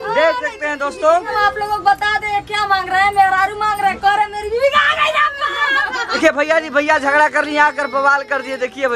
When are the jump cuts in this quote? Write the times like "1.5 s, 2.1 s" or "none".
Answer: 1.3 s, 6.2 s